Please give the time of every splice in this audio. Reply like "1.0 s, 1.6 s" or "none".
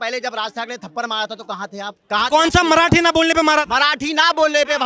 2.0 s